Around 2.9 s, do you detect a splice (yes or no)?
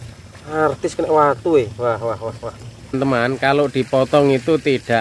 yes